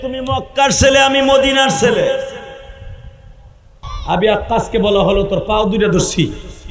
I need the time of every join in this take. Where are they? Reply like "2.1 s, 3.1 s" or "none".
3.9 s